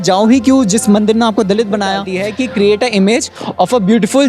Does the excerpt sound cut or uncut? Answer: cut